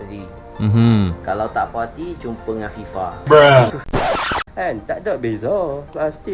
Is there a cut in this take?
yes; 1 cut; at 4.2 s

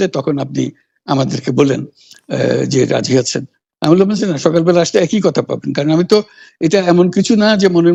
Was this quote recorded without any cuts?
yes; 0 cuts

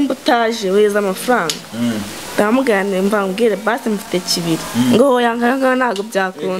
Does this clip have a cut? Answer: no; 0 cuts

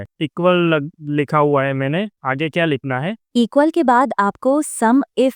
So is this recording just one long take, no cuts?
yes; 0 cuts

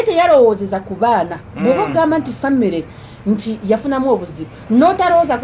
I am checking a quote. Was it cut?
no; 0 cuts

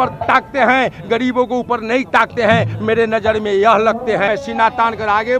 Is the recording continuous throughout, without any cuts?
no; 1 cut; at 4.3 s

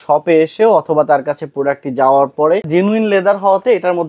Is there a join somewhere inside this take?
yes; 1 cut; at 2.7 s

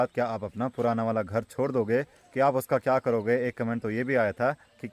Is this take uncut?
yes; 0 cuts

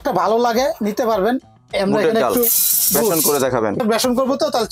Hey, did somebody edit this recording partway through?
yes; 2 cuts; at 1.6 s, 3.8 s

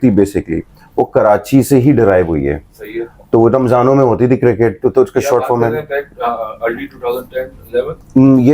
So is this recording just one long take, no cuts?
yes; 0 cuts

